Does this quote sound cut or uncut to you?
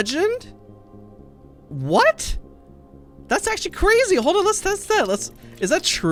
uncut